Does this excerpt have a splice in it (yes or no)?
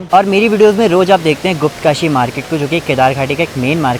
no